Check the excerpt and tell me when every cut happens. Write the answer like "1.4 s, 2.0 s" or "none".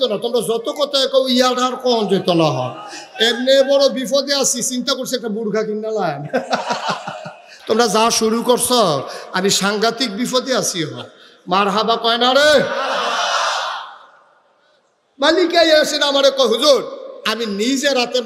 none